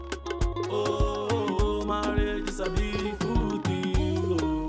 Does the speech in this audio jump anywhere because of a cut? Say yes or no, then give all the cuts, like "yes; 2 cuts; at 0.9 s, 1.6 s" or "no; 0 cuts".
no; 0 cuts